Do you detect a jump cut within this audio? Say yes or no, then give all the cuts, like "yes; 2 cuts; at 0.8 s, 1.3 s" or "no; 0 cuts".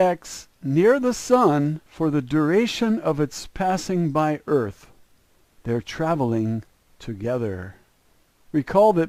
no; 0 cuts